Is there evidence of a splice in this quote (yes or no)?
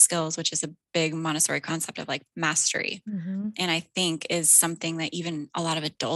no